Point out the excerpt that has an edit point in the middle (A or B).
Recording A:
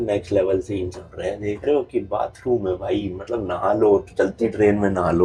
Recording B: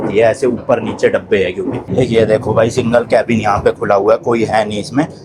B